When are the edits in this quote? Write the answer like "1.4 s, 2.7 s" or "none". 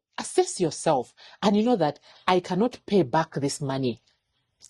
none